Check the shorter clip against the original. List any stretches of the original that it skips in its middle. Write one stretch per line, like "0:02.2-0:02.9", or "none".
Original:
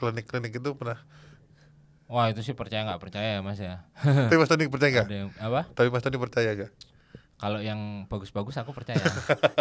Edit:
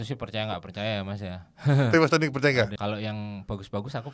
0:05.1-0:07.4